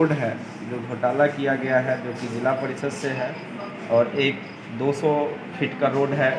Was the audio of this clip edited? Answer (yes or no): no